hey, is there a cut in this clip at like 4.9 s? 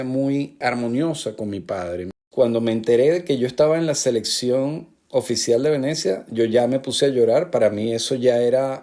no; 1 cut; at 2.2 s

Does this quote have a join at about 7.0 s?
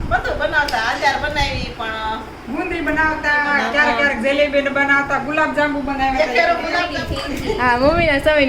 yes; 1 cut; at 7.0 s

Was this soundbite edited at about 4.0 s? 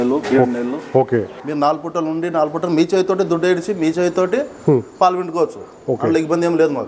no; 1 cut; at 1.4 s

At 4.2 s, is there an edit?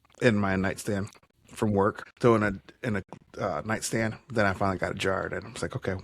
no; 1 cut; at 2.1 s

